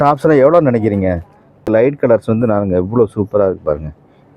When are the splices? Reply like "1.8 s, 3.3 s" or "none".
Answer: 1.9 s